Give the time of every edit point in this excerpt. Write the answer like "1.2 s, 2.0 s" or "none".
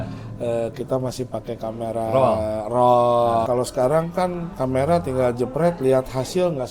3.5 s